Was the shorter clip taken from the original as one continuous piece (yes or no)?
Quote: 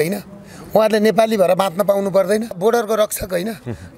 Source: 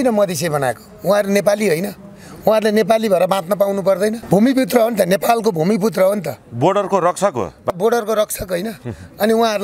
no